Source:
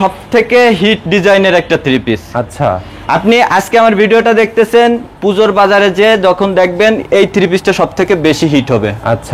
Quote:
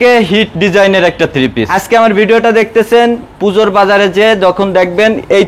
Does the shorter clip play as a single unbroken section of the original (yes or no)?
no